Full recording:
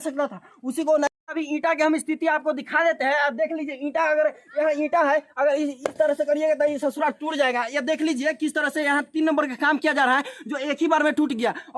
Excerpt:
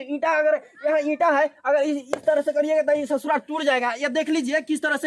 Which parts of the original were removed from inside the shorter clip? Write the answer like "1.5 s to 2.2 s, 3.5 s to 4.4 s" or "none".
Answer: none